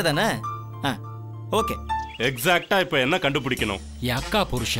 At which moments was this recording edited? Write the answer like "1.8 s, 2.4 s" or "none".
2.1 s